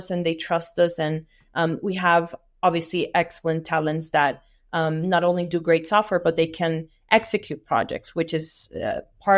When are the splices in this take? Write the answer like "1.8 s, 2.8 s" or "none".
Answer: none